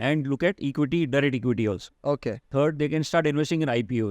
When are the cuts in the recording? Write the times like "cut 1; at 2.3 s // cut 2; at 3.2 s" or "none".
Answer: cut 1; at 2.4 s